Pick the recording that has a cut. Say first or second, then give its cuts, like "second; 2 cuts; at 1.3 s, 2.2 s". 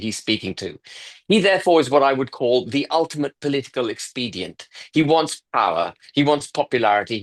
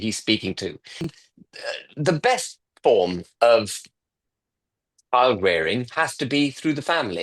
second; 1 cut; at 1.2 s